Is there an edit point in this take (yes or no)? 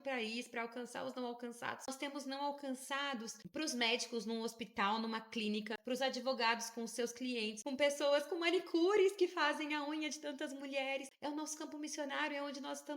yes